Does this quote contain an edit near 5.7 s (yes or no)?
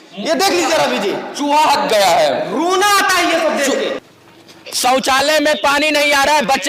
no